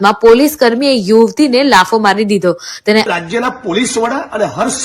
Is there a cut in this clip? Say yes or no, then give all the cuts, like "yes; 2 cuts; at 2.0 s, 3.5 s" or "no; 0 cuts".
yes; 1 cut; at 3.1 s